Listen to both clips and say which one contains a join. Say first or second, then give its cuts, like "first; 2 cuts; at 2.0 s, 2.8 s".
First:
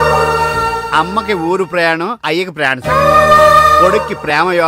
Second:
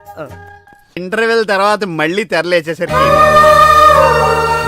second; 1 cut; at 1.0 s